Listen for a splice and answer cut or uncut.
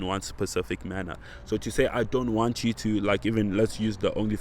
uncut